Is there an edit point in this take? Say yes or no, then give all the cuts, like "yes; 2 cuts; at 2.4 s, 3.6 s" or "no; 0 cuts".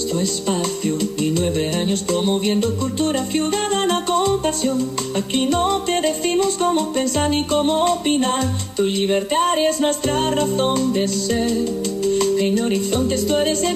yes; 1 cut; at 0.9 s